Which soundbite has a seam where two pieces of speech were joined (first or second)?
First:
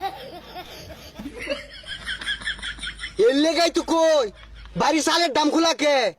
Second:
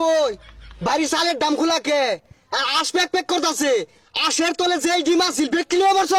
first